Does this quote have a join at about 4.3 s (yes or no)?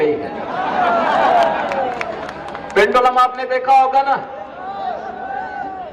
no